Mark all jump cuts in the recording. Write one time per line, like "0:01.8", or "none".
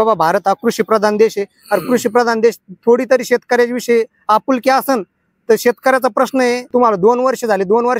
0:06.7